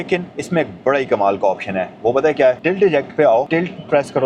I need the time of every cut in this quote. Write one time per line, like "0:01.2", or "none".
0:02.6
0:03.5